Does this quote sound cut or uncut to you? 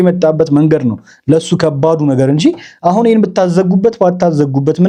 uncut